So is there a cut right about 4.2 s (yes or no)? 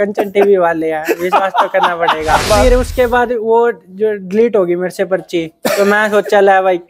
no